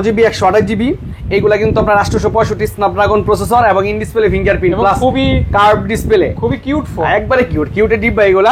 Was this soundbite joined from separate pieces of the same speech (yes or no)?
no